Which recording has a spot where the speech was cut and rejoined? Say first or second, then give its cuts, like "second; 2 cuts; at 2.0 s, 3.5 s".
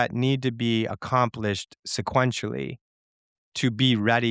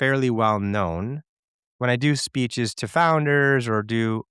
second; 1 cut; at 1.7 s